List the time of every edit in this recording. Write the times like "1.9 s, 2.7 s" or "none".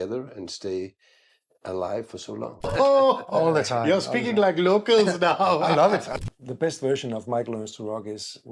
2.7 s, 6.1 s